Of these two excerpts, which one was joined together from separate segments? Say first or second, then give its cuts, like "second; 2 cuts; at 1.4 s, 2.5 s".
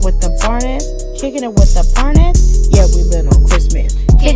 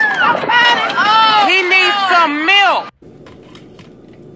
second; 1 cut; at 3.0 s